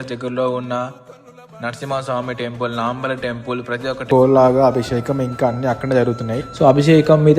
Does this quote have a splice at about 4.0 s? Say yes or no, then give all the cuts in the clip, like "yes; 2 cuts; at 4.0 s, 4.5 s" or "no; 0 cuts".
yes; 1 cut; at 4.0 s